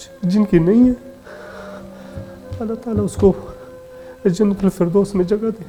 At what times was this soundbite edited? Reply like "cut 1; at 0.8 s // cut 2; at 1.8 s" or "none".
none